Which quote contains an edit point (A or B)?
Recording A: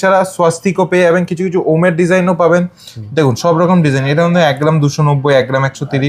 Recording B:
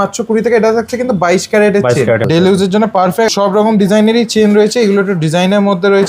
B